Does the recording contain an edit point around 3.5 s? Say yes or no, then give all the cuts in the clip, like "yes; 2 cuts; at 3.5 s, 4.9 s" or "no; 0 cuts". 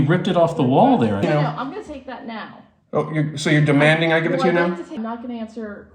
no; 2 cuts; at 1.2 s, 4.9 s